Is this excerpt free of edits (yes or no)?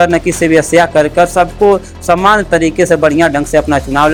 yes